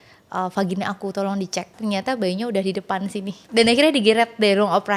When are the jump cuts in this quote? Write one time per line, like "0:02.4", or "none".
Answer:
0:01.7
0:03.4